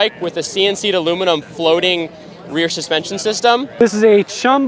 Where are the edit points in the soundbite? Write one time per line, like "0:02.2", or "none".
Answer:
0:03.7